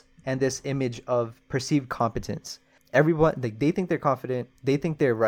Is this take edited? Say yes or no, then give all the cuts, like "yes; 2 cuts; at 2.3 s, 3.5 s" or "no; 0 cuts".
yes; 1 cut; at 2.7 s